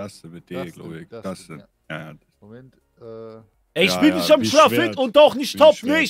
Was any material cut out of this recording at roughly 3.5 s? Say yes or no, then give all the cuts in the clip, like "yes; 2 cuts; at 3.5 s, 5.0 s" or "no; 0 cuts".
yes; 1 cut; at 3.5 s